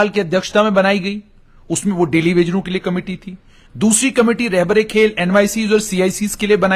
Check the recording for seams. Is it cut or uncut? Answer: cut